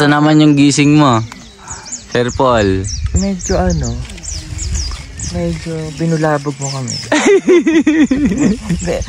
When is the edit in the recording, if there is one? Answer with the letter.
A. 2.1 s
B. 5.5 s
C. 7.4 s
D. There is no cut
D